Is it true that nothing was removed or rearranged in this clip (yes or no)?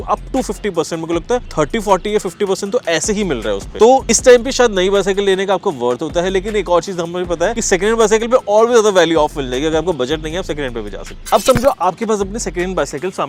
yes